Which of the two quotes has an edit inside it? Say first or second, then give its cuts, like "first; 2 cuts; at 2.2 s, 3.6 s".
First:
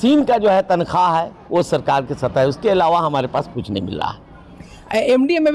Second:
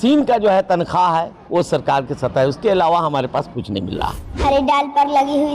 second; 1 cut; at 4.3 s